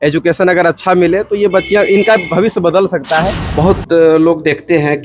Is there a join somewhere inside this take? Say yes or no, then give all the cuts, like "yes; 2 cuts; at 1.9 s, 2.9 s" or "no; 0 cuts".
yes; 1 cut; at 3.4 s